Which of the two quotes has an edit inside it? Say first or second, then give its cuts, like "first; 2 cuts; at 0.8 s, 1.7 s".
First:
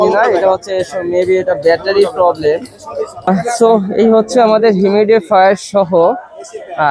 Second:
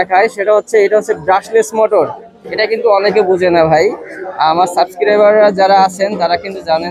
first; 1 cut; at 3.3 s